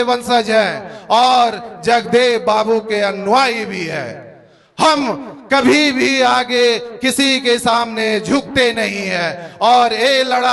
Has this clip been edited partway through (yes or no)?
no